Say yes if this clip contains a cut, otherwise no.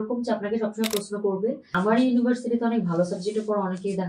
yes